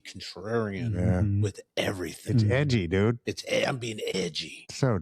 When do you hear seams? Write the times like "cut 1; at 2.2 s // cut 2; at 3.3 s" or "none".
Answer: cut 1; at 4.1 s